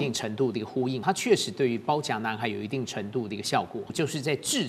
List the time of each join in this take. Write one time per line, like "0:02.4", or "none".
0:01.0
0:03.9